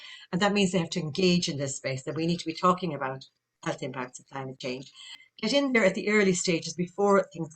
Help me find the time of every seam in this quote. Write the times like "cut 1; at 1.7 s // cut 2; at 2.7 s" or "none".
cut 1; at 5.2 s